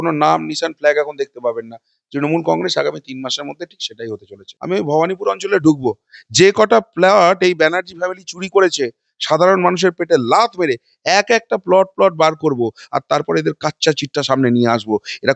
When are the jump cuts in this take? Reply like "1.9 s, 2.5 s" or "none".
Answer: 4.5 s